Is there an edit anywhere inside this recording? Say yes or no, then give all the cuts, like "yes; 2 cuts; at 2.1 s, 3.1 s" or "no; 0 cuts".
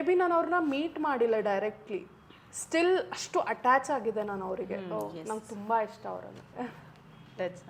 no; 0 cuts